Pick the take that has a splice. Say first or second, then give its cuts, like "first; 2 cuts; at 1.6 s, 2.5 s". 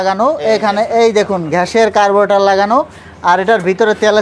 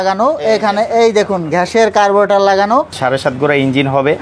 second; 1 cut; at 2.9 s